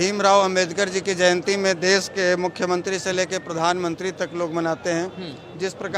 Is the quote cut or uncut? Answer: uncut